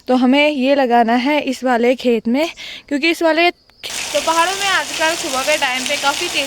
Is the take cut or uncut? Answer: cut